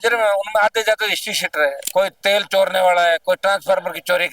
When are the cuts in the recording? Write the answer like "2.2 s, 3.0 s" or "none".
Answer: 1.8 s